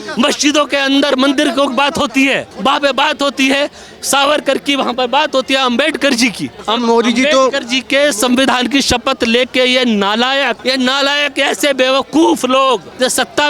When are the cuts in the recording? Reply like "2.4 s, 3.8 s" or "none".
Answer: none